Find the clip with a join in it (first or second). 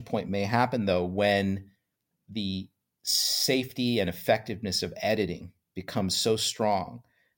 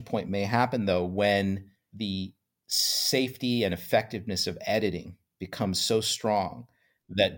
second